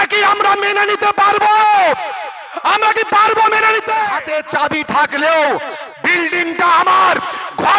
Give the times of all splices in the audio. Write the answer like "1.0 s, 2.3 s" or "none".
4.1 s